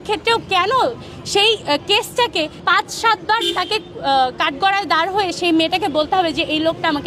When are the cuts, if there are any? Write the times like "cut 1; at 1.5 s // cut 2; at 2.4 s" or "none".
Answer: none